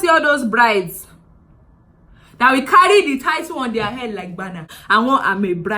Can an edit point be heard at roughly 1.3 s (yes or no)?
no